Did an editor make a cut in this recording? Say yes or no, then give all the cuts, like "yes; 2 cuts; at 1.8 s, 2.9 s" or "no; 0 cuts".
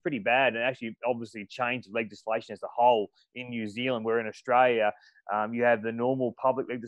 no; 0 cuts